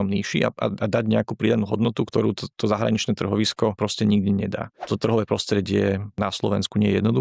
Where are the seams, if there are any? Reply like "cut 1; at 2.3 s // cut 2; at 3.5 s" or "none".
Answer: cut 1; at 2.1 s // cut 2; at 3.8 s // cut 3; at 4.8 s // cut 4; at 6.2 s